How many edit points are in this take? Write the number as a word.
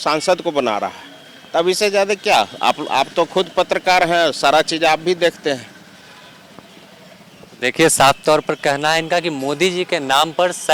zero